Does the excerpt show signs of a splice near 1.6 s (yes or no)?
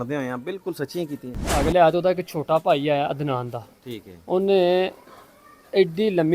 yes